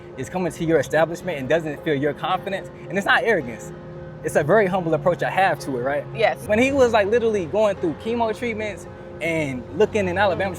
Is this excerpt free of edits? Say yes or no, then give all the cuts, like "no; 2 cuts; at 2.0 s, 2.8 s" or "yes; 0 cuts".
no; 1 cut; at 6.4 s